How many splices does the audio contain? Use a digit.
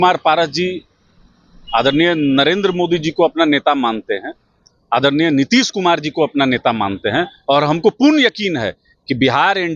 0